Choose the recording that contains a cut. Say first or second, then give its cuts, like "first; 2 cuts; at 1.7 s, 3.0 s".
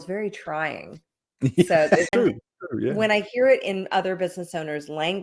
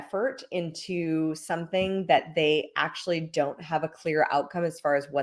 first; 1 cut; at 2.1 s